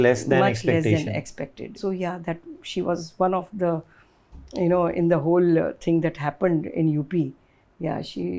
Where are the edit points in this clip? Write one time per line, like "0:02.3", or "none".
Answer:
0:01.7